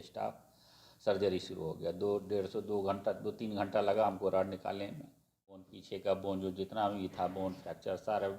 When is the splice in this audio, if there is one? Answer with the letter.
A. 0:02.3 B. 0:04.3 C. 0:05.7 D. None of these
C